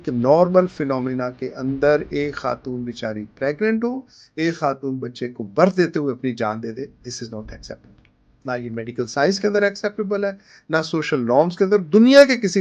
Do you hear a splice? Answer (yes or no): no